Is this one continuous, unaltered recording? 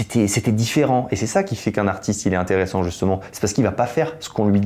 yes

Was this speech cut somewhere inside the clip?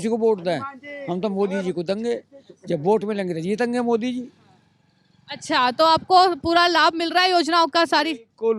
no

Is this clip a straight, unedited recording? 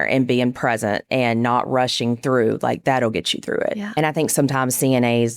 no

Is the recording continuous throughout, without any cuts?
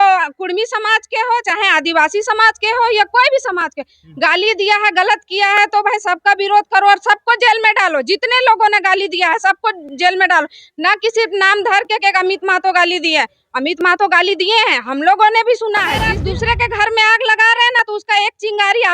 no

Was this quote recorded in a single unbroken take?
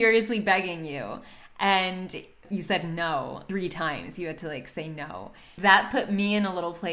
no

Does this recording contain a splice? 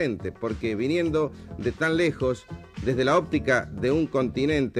yes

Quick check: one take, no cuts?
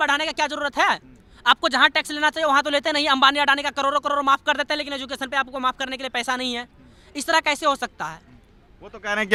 yes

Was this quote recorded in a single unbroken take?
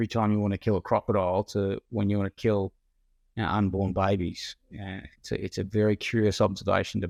yes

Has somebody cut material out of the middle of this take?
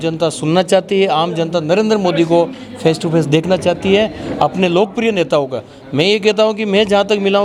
no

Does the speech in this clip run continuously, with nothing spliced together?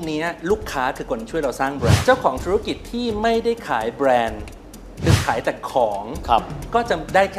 no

